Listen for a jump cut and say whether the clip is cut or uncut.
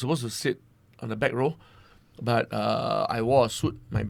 uncut